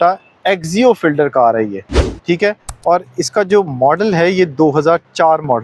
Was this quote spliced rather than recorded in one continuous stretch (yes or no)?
no